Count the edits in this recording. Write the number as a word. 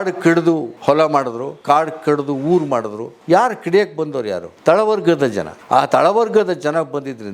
zero